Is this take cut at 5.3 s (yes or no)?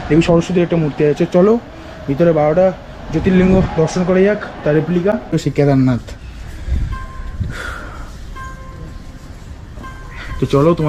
yes